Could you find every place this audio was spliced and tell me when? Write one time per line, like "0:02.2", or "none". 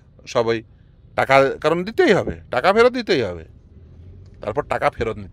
none